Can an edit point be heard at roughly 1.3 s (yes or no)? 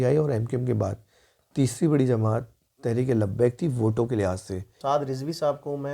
no